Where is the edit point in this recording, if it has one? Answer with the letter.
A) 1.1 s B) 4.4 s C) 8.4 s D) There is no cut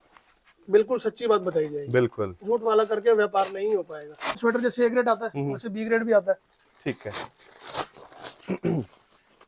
B